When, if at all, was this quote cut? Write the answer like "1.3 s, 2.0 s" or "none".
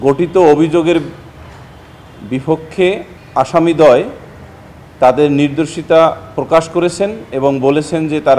3.2 s